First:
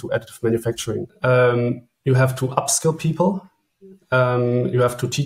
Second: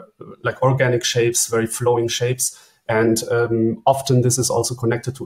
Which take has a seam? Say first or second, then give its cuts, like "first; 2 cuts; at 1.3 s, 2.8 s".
first; 1 cut; at 1.1 s